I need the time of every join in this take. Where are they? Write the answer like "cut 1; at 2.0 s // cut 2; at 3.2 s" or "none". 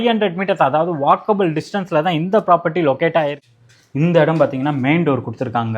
cut 1; at 3.4 s